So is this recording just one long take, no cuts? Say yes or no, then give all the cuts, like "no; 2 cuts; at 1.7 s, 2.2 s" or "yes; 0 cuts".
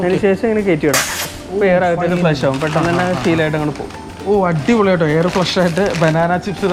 yes; 0 cuts